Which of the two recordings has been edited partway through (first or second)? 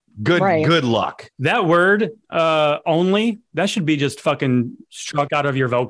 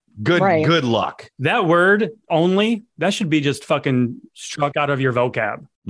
second